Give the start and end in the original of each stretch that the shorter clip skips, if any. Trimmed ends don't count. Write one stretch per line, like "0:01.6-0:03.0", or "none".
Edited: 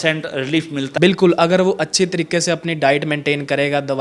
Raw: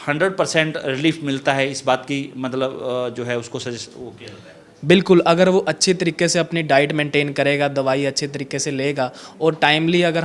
0:01.4-0:04.8